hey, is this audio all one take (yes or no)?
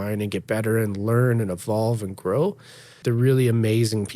no